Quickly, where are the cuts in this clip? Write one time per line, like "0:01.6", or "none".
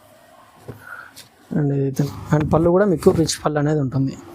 0:02.1